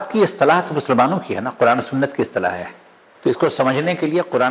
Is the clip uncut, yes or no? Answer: no